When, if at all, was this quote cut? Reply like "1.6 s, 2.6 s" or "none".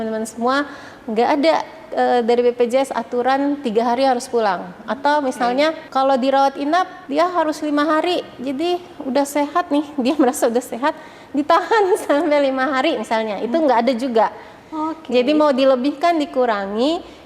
5.8 s, 7.0 s